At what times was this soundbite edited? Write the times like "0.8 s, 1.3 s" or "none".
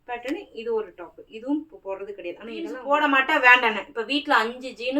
2.8 s